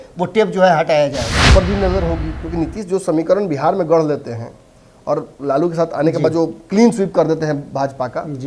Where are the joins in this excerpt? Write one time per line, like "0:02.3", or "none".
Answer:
0:01.4